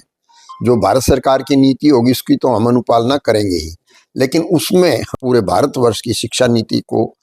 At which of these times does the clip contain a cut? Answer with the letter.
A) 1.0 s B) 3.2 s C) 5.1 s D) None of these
C